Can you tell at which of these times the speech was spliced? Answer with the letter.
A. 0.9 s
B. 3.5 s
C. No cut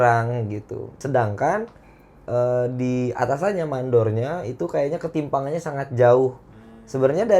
A